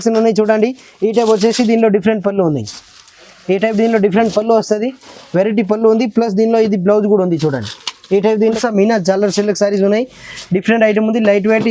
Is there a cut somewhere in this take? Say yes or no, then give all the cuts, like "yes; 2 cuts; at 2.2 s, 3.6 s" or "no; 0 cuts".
yes; 1 cut; at 8.4 s